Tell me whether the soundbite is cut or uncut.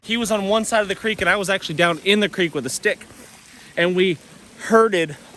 uncut